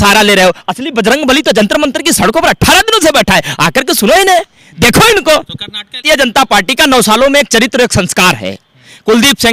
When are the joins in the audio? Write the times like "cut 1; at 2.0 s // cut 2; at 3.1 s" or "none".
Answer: cut 1; at 6.0 s